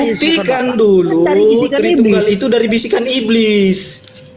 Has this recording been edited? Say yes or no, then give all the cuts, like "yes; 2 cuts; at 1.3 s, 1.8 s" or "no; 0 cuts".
no; 0 cuts